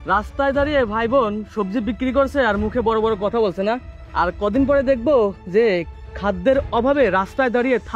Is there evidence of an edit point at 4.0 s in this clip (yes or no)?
yes